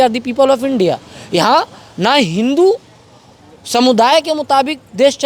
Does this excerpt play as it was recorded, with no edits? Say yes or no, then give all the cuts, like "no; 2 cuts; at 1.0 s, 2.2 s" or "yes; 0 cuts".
yes; 0 cuts